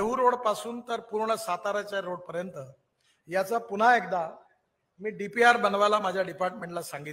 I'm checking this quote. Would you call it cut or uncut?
uncut